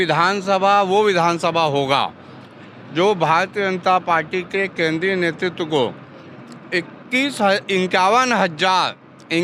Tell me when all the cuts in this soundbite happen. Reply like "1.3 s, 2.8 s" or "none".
none